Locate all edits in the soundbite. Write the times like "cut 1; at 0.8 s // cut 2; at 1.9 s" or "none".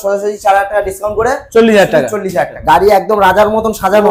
cut 1; at 2.6 s